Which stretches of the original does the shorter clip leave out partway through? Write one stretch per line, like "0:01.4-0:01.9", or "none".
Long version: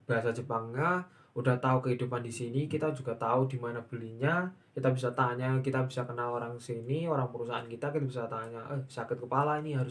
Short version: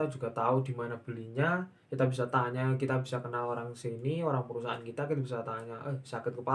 none